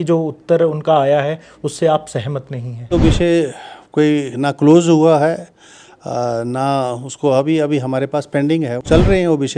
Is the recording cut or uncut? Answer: cut